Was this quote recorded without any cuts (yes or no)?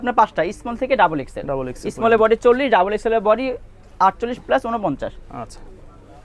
yes